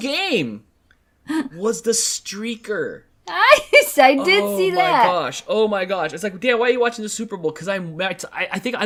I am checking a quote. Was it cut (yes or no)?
no